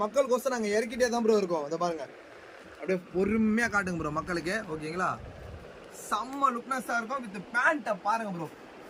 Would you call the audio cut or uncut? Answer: uncut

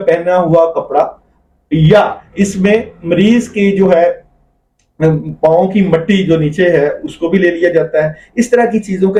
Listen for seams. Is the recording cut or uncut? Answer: uncut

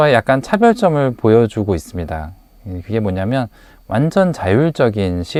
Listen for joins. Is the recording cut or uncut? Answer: uncut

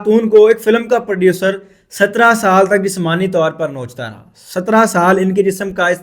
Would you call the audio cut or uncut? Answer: uncut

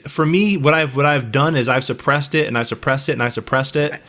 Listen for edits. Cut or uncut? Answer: uncut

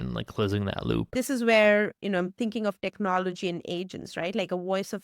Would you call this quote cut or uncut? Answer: cut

